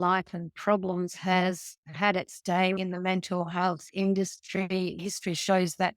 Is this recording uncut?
no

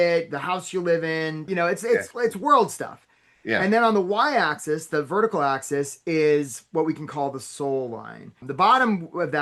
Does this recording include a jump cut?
yes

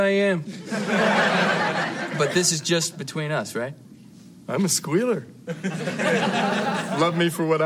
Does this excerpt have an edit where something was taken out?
no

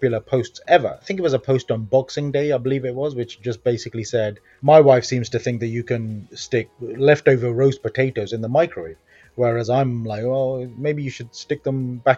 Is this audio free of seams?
no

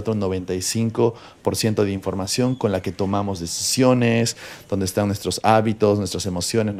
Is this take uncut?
yes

